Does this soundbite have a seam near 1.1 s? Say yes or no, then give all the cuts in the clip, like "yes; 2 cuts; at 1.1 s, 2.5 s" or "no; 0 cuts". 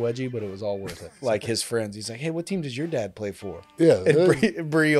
yes; 1 cut; at 1.1 s